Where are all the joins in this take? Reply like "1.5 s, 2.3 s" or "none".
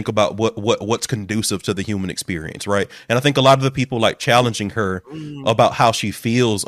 none